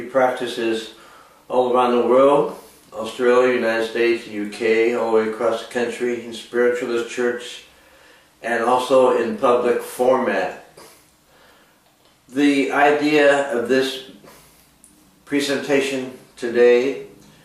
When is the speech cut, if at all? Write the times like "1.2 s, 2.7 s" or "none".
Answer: 10.5 s

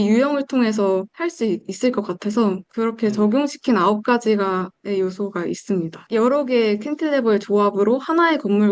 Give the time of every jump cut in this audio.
5.9 s

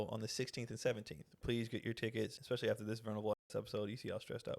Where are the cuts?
1.4 s, 2.4 s

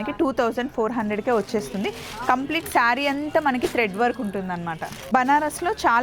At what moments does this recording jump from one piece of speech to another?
4.9 s

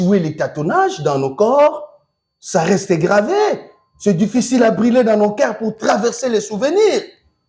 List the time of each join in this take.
none

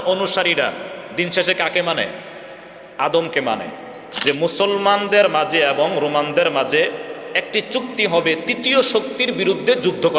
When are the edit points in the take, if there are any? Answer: 4.1 s

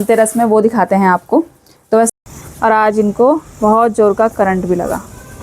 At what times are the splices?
2.1 s

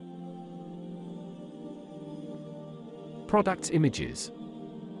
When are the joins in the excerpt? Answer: 3.3 s, 4.1 s

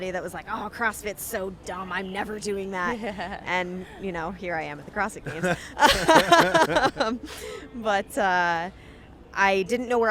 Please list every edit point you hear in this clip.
none

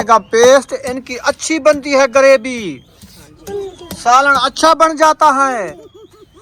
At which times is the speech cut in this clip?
none

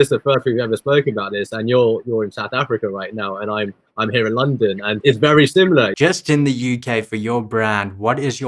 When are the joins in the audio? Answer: 5.0 s, 5.9 s

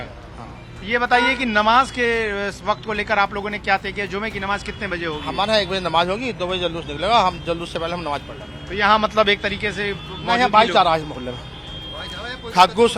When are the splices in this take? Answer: none

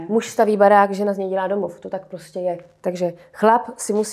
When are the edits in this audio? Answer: none

